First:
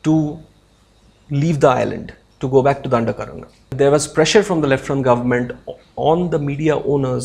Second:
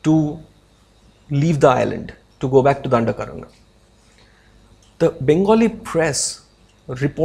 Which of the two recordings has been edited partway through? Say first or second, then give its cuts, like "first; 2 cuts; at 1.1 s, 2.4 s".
first; 1 cut; at 3.7 s